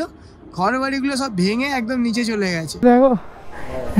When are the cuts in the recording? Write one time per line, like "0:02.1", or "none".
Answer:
0:02.8